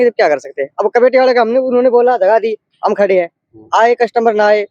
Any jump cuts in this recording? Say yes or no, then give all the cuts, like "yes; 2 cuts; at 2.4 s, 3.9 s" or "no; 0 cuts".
no; 0 cuts